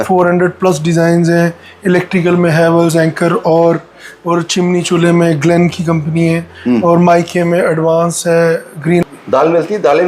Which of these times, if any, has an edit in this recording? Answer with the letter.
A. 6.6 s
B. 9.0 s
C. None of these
B